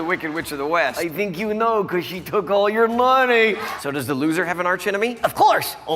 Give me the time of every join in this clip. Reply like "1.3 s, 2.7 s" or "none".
0.9 s, 3.7 s